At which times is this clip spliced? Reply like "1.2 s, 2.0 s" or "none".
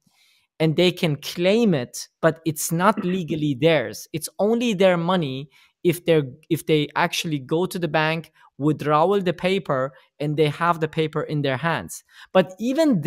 none